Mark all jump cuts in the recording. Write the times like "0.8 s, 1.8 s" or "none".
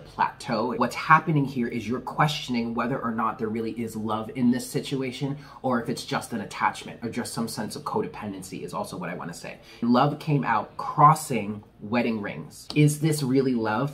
0.8 s, 9.8 s, 12.5 s